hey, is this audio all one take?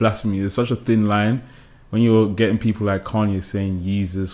yes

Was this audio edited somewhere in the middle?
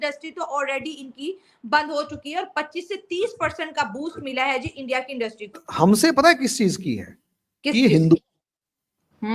yes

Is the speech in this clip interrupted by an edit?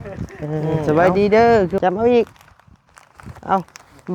yes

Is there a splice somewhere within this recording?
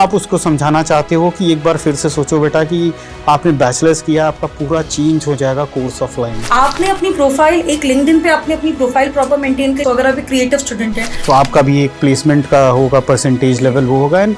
yes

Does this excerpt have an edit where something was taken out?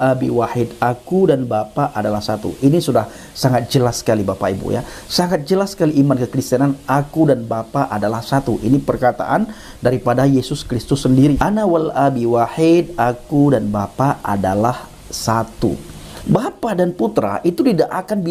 yes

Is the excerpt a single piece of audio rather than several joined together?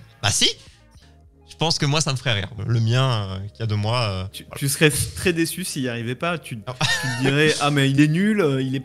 no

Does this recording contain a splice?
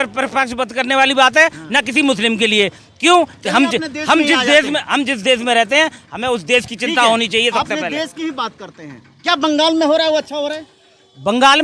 no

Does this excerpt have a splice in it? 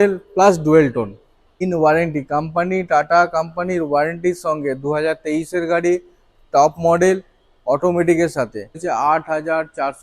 yes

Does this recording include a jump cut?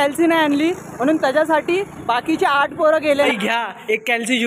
yes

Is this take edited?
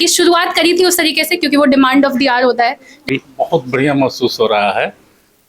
yes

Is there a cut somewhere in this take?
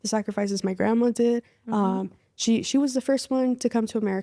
no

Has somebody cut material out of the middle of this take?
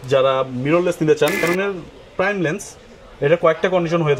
yes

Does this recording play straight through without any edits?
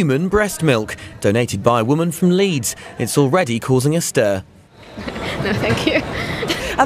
no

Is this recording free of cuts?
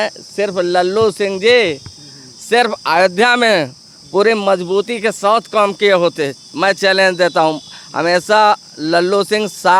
yes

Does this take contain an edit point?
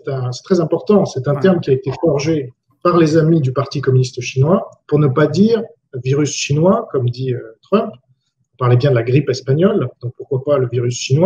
no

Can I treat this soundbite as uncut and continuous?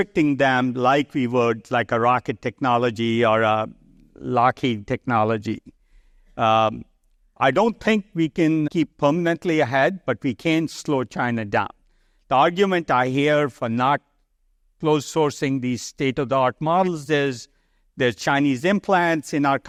yes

